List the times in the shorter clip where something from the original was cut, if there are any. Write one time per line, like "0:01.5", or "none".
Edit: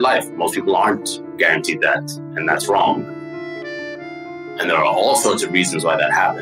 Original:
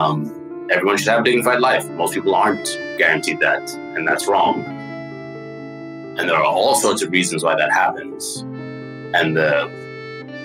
none